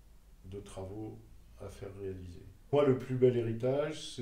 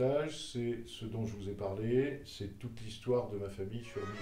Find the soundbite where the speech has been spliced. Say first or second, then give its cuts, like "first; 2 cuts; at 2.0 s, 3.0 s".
first; 1 cut; at 2.7 s